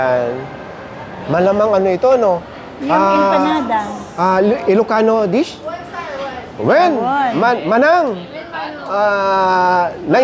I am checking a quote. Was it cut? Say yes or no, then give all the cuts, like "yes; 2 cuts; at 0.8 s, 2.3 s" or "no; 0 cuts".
yes; 1 cut; at 1.1 s